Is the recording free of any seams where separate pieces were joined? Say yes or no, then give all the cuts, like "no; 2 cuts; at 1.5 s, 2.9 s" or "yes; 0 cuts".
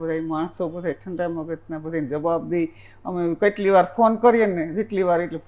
yes; 0 cuts